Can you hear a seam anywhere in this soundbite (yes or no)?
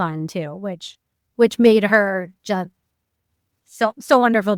no